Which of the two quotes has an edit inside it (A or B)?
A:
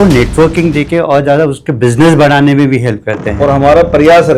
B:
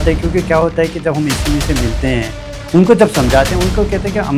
A